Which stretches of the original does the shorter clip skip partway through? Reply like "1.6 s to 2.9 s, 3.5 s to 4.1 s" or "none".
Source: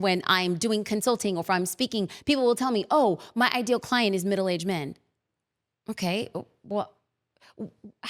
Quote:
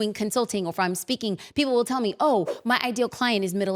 none

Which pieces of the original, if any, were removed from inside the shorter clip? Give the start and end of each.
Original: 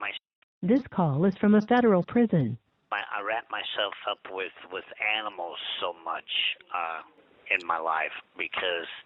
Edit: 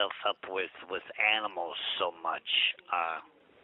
none

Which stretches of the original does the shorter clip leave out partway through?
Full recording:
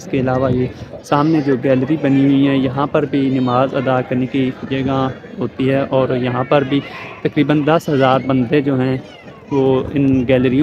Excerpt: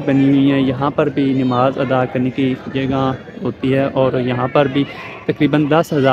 none

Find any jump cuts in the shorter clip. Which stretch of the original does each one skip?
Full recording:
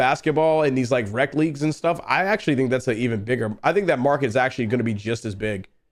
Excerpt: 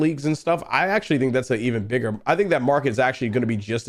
none

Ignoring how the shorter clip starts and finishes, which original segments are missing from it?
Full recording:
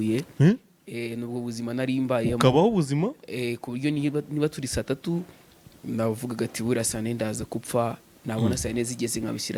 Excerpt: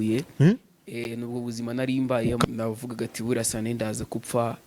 2.4 s to 5.8 s

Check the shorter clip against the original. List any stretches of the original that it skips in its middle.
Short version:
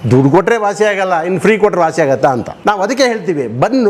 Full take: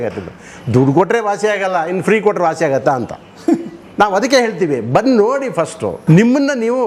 3.1 s to 3.8 s

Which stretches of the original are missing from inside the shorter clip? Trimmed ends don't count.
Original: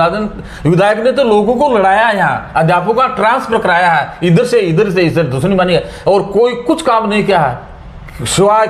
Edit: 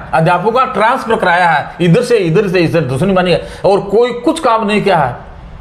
none

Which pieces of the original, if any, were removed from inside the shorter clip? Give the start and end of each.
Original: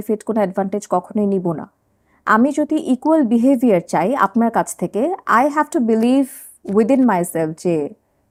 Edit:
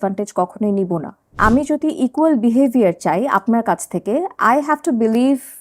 1.7 s to 2.1 s

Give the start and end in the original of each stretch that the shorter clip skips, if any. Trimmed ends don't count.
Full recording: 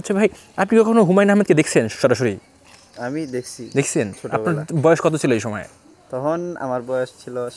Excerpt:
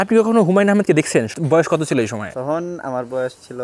1.9 s to 4.6 s, 5.6 s to 6.0 s

